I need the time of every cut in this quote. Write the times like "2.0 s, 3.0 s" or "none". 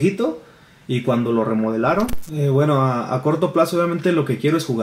2.2 s